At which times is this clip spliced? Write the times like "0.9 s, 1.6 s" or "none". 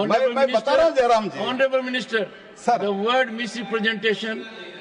none